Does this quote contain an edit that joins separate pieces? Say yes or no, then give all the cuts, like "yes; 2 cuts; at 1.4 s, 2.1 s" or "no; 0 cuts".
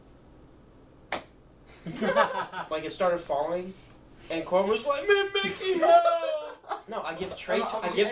yes; 2 cuts; at 2.7 s, 6.8 s